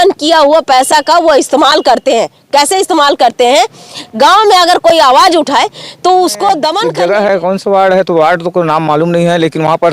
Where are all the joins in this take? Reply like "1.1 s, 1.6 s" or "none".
6.8 s